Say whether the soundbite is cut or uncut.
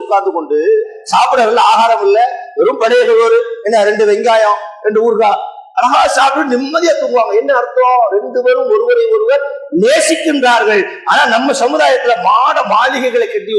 uncut